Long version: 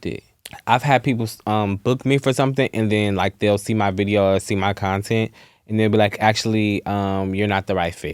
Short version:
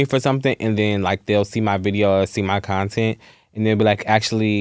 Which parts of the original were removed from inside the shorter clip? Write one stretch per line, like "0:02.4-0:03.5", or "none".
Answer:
none